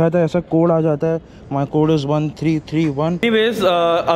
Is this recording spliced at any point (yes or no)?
yes